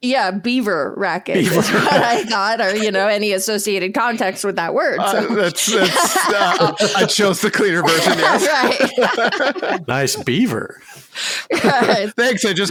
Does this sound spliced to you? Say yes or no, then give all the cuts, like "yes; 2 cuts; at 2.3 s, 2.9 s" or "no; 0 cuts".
no; 0 cuts